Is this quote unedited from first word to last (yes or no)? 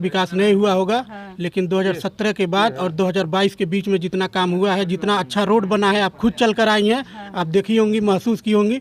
yes